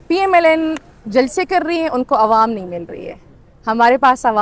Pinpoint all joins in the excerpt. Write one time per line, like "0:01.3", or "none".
none